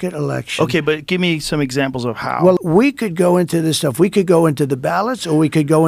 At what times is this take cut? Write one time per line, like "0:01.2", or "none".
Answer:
0:02.6